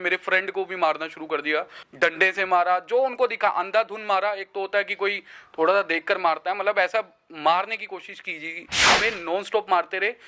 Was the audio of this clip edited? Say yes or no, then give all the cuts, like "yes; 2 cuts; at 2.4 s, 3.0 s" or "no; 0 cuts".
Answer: yes; 2 cuts; at 1.8 s, 8.9 s